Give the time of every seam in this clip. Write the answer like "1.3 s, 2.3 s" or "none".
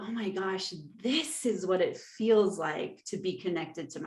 none